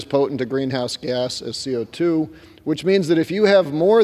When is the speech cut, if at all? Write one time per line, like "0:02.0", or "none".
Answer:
none